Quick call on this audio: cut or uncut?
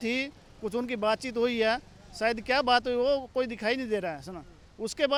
uncut